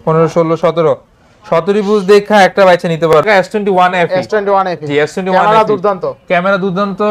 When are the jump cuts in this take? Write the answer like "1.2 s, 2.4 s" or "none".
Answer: 3.1 s